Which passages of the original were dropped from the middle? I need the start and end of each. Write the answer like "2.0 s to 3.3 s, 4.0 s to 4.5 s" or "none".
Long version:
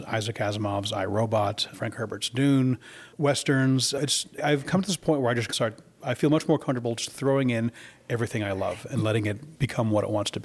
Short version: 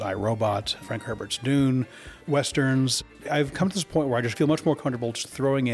3.9 s to 4.1 s, 5.5 s to 6.2 s